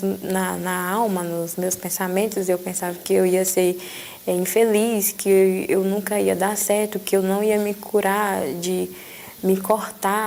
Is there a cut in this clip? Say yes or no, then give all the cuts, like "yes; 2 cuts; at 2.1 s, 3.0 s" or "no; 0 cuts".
no; 0 cuts